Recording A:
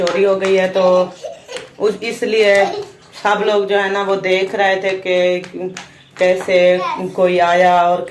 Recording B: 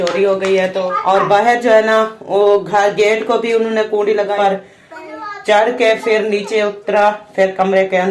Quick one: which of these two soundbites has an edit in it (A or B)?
B